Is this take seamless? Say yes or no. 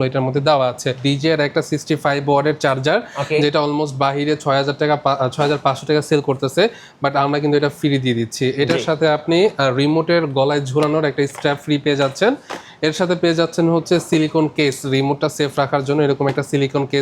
no